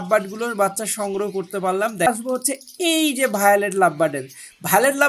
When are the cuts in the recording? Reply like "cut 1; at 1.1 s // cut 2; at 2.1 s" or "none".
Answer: cut 1; at 2.1 s